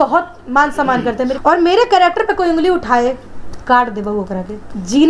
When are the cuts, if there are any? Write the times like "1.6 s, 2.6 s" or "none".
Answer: 1.4 s